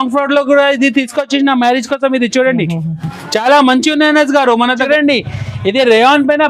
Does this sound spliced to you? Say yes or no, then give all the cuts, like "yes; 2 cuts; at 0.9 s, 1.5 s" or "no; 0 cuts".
yes; 1 cut; at 4.8 s